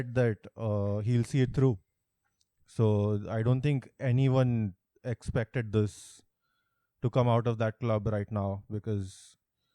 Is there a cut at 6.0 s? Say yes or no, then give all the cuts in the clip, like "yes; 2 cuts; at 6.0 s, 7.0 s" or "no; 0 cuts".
no; 0 cuts